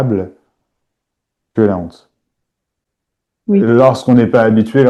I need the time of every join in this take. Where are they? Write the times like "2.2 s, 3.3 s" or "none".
none